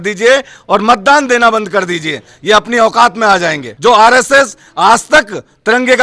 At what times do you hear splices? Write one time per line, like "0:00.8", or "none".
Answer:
0:03.7